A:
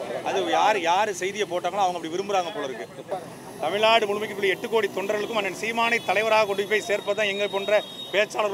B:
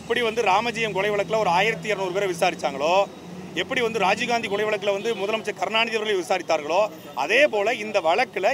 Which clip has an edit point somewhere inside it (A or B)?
A